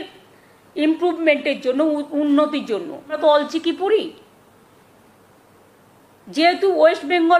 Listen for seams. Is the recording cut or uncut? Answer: cut